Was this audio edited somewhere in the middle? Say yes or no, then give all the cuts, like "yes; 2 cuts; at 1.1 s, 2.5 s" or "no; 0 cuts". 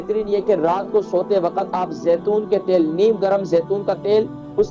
no; 0 cuts